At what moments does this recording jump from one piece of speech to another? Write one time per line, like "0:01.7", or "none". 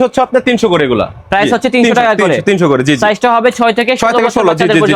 none